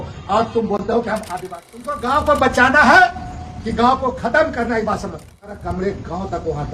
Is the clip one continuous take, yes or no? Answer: no